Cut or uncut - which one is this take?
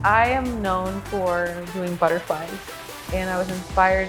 cut